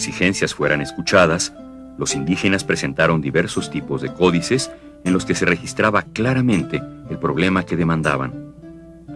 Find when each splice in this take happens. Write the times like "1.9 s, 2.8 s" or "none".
2.9 s